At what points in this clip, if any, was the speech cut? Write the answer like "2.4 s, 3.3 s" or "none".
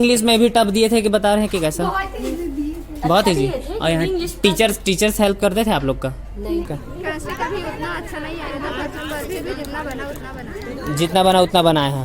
6.7 s

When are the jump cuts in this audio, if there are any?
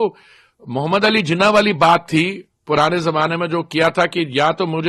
none

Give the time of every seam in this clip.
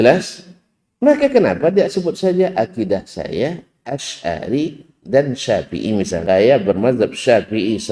6.2 s

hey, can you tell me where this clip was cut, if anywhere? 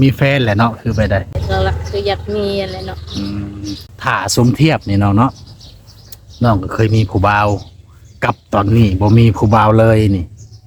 1.4 s, 3.8 s

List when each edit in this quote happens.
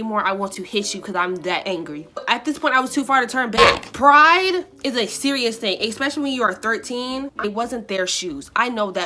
2.2 s, 7.4 s

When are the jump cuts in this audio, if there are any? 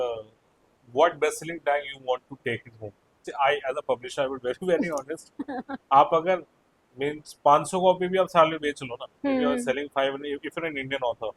3.2 s

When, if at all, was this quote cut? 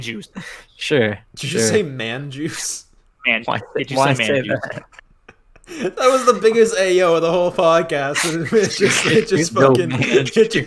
none

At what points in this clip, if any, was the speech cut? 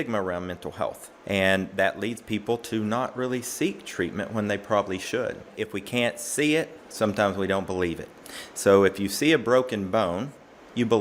1.1 s, 5.5 s

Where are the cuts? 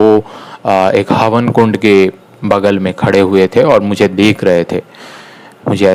none

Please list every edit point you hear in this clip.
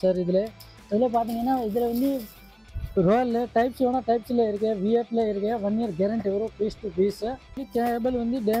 7.6 s

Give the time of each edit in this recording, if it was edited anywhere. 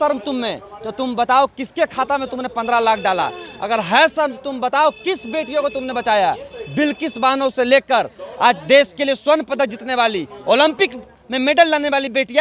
none

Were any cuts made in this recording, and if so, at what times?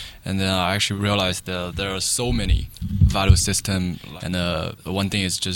2.7 s, 4.0 s, 4.8 s

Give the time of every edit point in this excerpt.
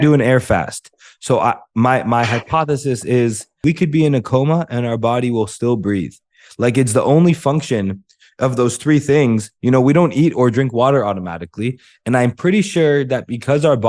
3.6 s

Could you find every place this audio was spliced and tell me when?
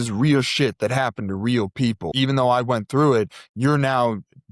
2.1 s

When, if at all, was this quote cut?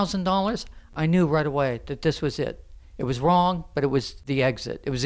0.9 s, 4.2 s

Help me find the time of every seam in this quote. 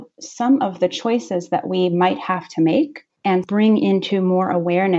3.4 s

